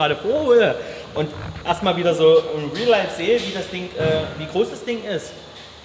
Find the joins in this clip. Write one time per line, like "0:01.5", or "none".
none